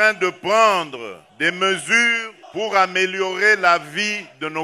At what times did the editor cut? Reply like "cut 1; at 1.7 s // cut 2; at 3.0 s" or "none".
cut 1; at 1.2 s // cut 2; at 2.3 s